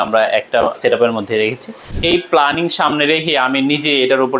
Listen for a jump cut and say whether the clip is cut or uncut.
cut